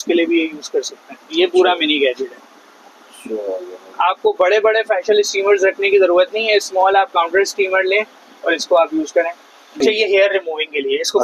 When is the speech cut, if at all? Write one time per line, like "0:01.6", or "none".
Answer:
0:09.8

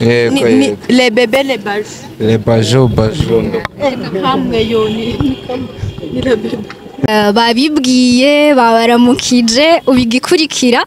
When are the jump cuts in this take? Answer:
0:07.1

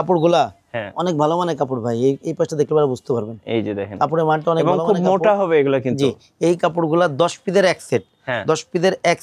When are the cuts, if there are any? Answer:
none

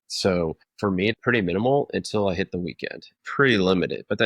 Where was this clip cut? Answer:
0:00.8
0:03.1

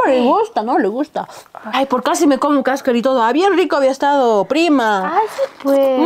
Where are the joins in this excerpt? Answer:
0:01.6

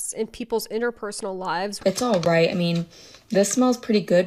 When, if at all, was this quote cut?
0:01.8

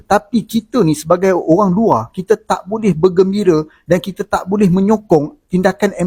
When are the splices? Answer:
none

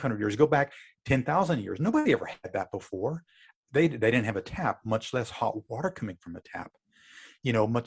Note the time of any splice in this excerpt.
none

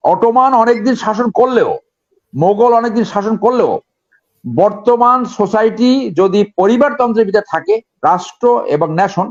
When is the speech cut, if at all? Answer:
none

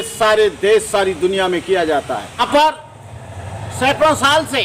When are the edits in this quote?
0:02.4

